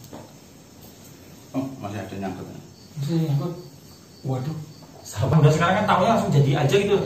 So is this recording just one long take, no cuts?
no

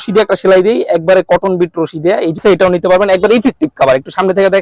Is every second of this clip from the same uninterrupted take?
no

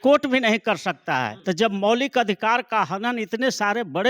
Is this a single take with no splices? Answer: no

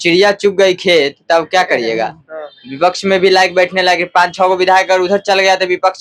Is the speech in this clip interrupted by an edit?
no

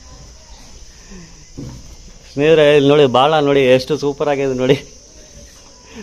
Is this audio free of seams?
yes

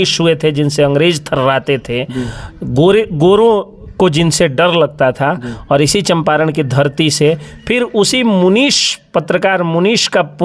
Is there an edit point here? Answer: no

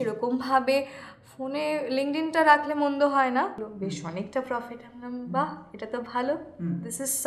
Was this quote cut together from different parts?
yes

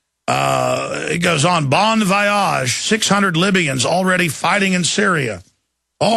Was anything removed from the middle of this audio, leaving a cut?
yes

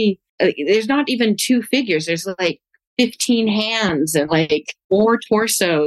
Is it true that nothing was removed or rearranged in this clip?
no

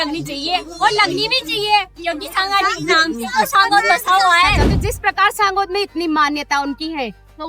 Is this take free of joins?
no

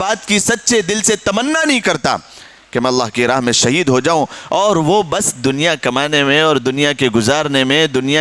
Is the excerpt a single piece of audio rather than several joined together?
yes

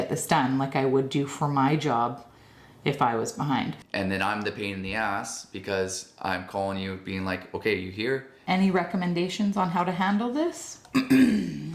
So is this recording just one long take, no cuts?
no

